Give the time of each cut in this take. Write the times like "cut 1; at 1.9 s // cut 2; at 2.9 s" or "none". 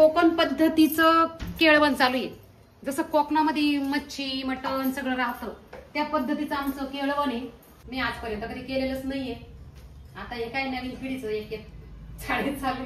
cut 1; at 7.8 s